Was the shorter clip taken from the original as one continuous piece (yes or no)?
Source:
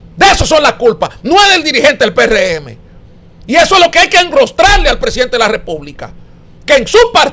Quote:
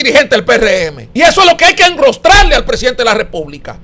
no